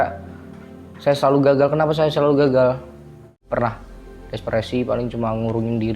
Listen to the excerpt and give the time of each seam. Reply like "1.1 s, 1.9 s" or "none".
3.4 s